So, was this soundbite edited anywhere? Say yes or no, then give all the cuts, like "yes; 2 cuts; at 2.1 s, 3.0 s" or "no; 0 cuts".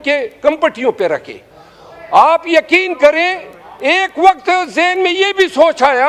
no; 0 cuts